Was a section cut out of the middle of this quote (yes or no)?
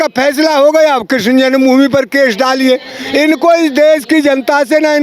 no